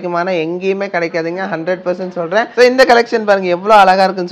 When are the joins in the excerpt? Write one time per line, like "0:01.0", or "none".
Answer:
0:02.5